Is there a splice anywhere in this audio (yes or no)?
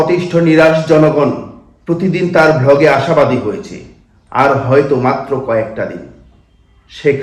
no